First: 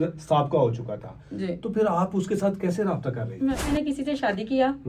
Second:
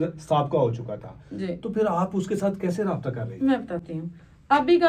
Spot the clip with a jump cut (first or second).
first